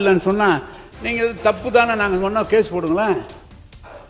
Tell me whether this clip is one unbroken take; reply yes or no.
yes